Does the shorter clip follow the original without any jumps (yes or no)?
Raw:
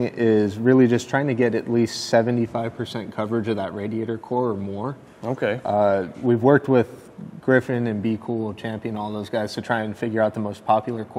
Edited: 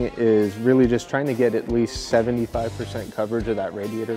yes